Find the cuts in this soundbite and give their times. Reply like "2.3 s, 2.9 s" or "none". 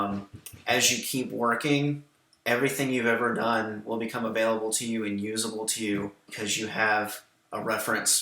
6.3 s